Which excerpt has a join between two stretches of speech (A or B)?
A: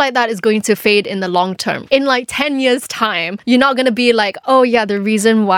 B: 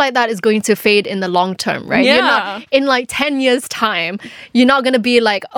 A